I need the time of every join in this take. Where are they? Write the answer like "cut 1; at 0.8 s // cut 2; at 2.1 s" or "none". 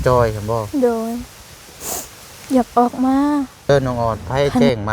cut 1; at 3.7 s